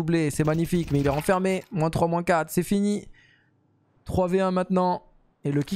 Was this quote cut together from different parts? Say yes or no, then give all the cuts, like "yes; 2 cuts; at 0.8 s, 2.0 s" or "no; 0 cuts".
no; 0 cuts